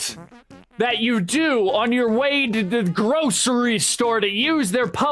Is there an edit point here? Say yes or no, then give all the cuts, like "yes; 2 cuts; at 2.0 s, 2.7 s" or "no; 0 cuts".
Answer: no; 0 cuts